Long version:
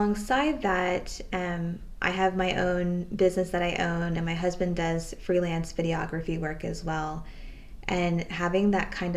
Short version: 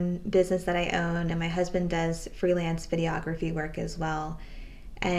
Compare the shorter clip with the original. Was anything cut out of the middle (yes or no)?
no